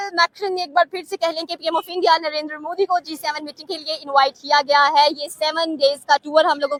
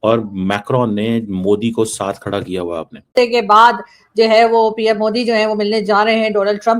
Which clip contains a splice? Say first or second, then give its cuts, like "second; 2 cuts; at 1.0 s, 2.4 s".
second; 1 cut; at 3.2 s